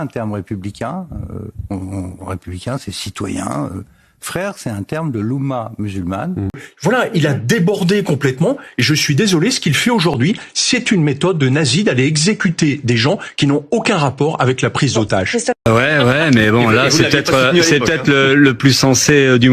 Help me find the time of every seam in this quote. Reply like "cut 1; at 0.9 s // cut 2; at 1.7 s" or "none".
cut 1; at 6.7 s // cut 2; at 15.6 s